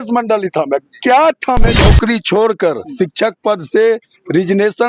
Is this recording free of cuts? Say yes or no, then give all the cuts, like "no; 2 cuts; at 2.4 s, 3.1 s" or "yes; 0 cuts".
no; 1 cut; at 1.8 s